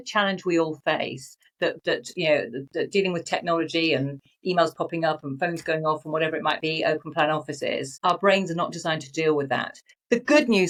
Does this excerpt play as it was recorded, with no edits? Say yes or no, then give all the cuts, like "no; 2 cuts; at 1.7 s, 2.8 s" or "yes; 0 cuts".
yes; 0 cuts